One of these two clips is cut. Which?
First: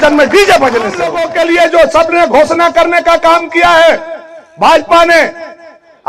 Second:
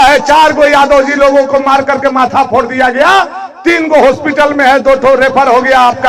first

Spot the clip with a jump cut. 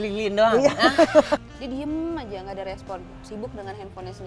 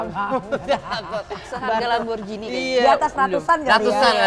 first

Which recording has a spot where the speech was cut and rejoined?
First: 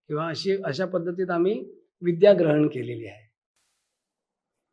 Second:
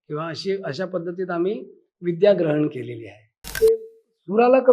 second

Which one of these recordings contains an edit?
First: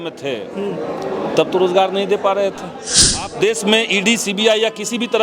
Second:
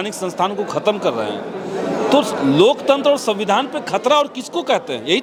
first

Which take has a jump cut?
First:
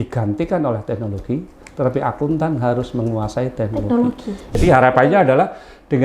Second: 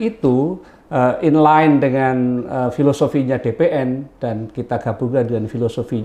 first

